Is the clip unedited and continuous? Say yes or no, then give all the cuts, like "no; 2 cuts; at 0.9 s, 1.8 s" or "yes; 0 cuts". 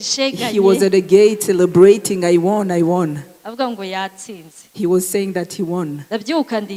yes; 0 cuts